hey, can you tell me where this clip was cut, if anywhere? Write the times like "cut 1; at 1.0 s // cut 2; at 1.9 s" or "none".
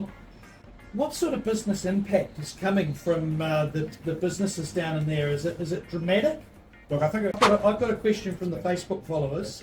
cut 1; at 7.4 s

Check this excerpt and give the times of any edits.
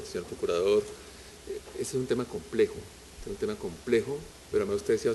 cut 1; at 1.0 s

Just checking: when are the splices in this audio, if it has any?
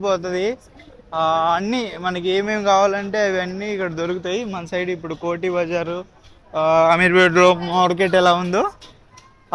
none

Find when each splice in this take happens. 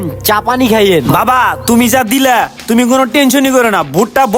none

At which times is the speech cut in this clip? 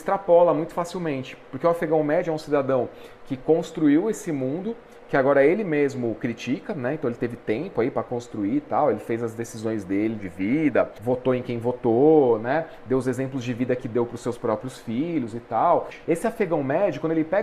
cut 1; at 15.9 s

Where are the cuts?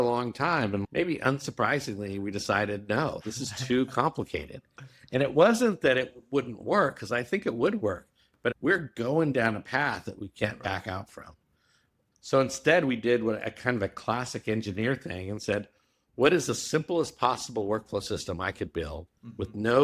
cut 1; at 8.6 s

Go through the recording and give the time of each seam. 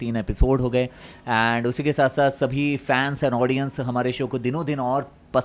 none

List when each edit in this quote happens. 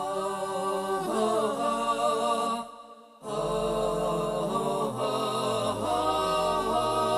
cut 1; at 5.2 s

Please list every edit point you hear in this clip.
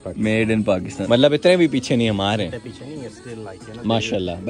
cut 1; at 0.9 s

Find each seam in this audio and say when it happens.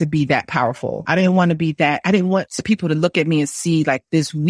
cut 1; at 1.0 s // cut 2; at 2.5 s

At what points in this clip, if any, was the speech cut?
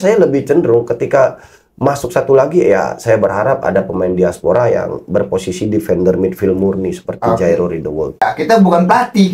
cut 1; at 8.2 s

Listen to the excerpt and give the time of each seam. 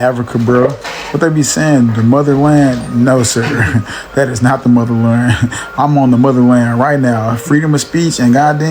none

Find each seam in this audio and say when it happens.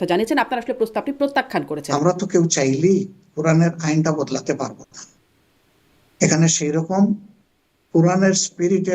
cut 1; at 1.8 s

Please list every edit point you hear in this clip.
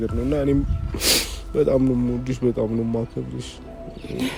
none

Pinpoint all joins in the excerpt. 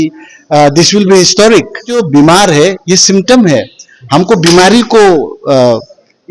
cut 1; at 1.9 s

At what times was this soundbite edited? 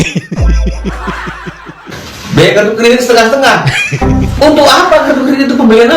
cut 1; at 2.0 s

